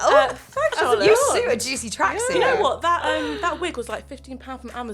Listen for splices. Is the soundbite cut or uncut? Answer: uncut